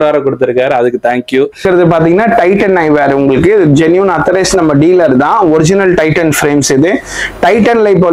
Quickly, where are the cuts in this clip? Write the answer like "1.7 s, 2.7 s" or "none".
1.6 s